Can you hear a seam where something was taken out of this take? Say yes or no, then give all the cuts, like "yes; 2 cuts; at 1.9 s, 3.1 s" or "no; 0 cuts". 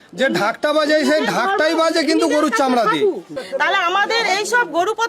yes; 1 cut; at 3.4 s